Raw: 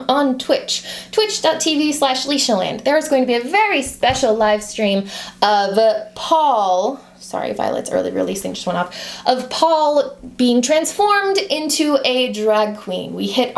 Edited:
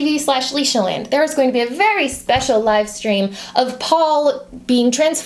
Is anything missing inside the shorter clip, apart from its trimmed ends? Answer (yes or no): yes